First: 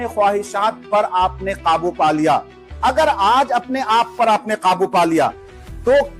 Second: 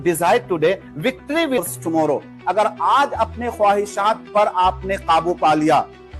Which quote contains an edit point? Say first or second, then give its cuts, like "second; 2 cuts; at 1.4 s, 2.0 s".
second; 1 cut; at 1.5 s